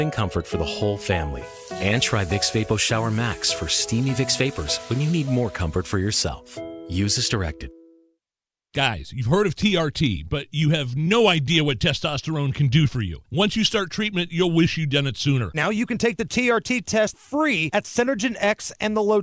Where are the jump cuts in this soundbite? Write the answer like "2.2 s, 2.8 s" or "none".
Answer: 8.6 s